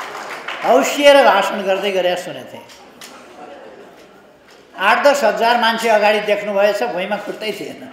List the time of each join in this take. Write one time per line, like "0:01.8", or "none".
none